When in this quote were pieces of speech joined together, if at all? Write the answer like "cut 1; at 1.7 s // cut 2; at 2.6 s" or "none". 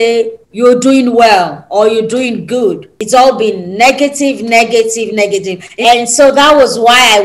cut 1; at 2.9 s // cut 2; at 5.6 s